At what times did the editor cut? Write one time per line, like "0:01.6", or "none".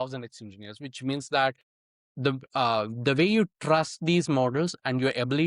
none